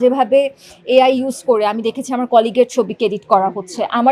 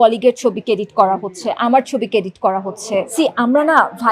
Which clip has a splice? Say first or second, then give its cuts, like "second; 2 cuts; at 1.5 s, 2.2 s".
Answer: second; 1 cut; at 3.1 s